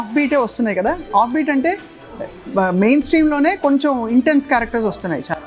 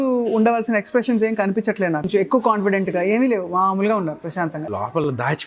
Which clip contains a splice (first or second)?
second